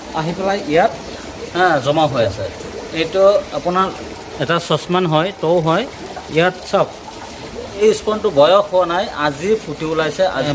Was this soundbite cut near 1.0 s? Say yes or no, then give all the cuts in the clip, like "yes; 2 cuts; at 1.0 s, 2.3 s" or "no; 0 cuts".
no; 0 cuts